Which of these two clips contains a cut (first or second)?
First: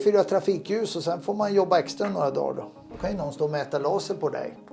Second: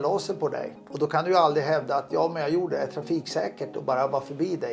first